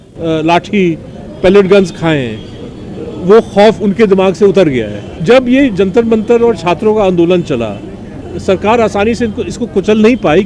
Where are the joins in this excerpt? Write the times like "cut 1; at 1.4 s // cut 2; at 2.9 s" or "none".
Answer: cut 1; at 5.1 s